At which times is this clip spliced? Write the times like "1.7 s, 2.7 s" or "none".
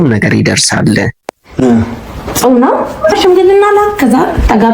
3.1 s